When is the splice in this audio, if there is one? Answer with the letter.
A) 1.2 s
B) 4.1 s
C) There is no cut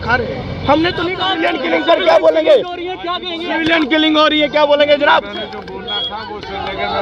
A